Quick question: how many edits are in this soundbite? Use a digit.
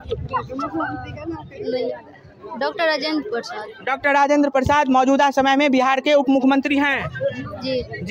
0